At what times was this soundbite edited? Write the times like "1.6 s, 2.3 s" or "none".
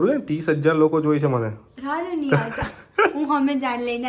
none